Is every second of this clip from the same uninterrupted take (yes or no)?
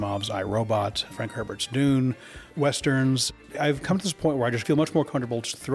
no